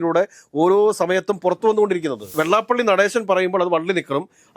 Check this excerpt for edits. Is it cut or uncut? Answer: cut